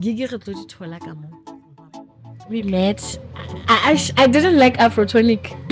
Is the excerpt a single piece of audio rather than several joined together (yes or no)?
no